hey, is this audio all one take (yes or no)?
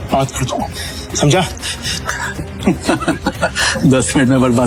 yes